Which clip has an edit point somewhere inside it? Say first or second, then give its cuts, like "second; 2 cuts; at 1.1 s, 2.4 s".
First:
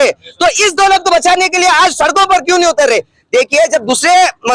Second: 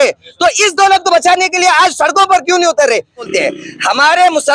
second; 1 cut; at 3.3 s